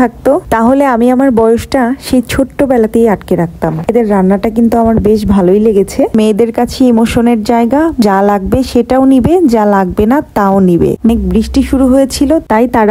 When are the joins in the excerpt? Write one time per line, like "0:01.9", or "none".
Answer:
0:03.9
0:06.2
0:08.0
0:11.1